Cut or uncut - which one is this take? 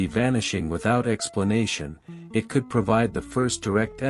uncut